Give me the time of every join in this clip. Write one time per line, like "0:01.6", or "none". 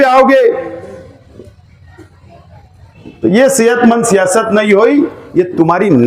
none